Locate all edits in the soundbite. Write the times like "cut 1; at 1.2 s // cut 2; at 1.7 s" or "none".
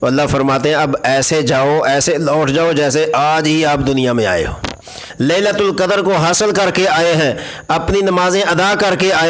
cut 1; at 5.0 s